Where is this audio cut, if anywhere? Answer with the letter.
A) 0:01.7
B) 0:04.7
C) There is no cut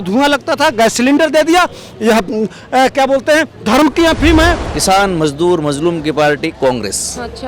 B